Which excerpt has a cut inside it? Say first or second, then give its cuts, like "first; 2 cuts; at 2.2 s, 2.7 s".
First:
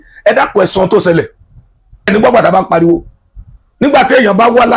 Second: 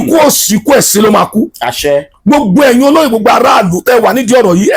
first; 1 cut; at 2.1 s